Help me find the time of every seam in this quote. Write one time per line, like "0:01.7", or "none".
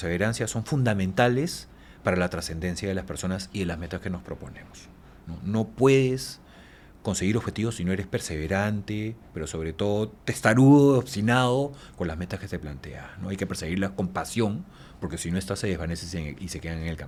none